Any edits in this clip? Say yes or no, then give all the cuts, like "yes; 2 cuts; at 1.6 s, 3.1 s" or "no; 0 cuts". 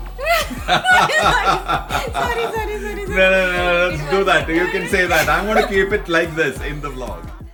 no; 0 cuts